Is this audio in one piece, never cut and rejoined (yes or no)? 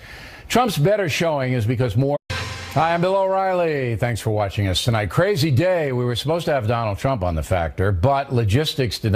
yes